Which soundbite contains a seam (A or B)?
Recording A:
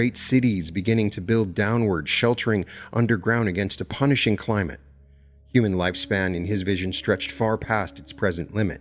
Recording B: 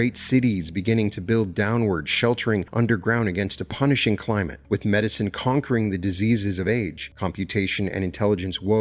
B